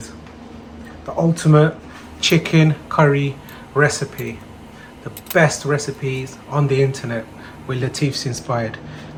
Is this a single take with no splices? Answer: yes; 0 cuts

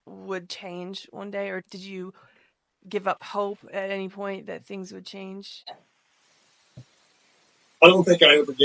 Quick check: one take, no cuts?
yes; 0 cuts

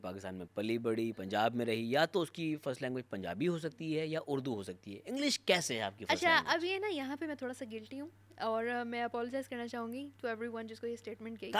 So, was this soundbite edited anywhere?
no; 0 cuts

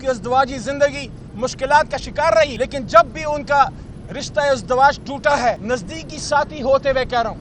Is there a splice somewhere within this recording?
yes; 2 cuts; at 2.5 s, 5.6 s

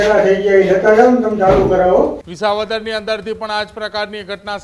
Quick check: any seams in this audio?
yes; 1 cut; at 2.3 s

